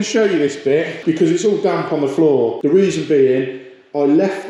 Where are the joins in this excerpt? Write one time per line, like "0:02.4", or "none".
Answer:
0:00.9
0:02.6